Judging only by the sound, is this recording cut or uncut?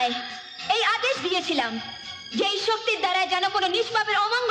uncut